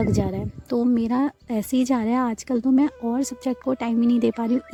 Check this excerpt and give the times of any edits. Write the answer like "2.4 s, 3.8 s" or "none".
none